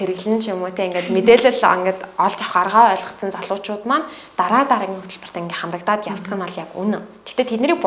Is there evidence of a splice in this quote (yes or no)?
no